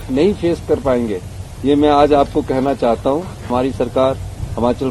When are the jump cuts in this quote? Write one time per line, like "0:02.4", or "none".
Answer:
0:03.5